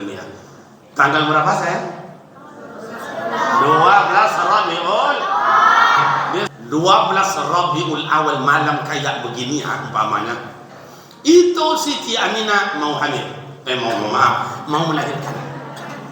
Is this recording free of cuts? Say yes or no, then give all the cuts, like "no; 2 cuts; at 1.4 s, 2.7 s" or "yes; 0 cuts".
no; 1 cut; at 6.6 s